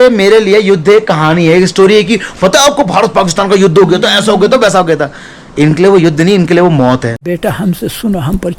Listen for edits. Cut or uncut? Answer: cut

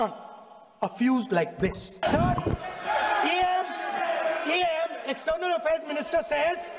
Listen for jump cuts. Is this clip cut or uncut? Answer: cut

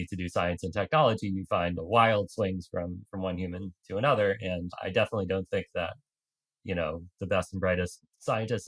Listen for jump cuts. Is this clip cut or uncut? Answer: uncut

